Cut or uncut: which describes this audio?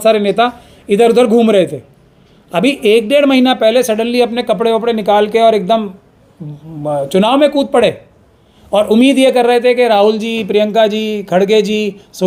uncut